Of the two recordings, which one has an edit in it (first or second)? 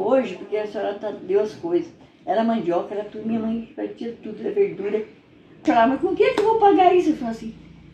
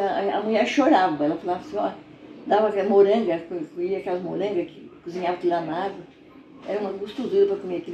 first